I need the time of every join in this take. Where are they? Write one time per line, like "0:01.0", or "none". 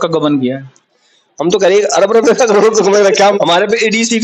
0:03.4